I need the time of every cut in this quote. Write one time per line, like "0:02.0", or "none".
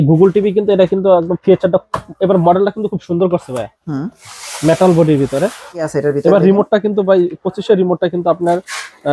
0:05.9